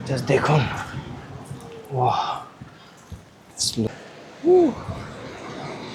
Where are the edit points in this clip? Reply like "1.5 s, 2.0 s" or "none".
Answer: 3.9 s